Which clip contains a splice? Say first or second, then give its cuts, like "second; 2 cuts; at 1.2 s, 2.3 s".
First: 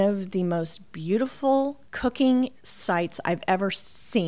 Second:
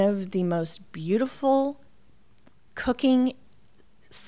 first; 2 cuts; at 1.8 s, 2.7 s